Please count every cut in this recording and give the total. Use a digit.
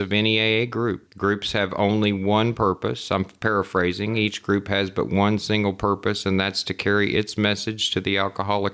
1